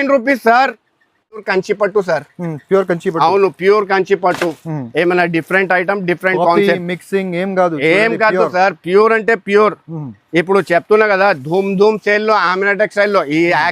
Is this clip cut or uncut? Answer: cut